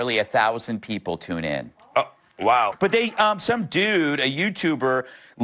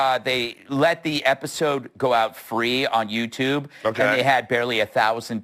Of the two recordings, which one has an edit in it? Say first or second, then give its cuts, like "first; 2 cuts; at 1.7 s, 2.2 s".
first; 1 cut; at 2.7 s